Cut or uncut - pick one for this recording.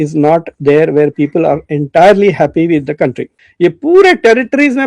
cut